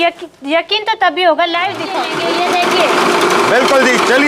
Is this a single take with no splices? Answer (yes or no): no